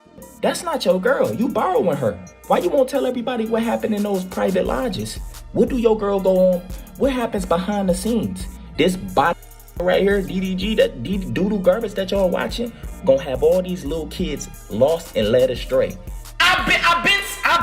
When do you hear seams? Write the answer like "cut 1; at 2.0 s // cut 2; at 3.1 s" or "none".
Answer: cut 1; at 16.2 s